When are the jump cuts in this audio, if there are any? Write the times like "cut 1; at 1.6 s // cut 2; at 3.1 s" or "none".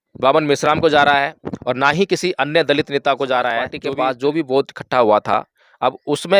cut 1; at 3.8 s